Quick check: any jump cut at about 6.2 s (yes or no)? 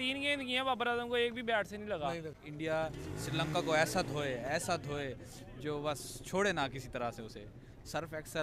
no